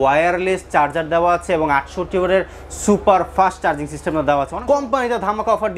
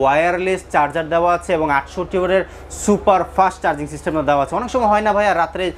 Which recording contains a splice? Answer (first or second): first